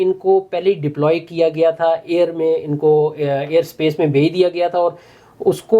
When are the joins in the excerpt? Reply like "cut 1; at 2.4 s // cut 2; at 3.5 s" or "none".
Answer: none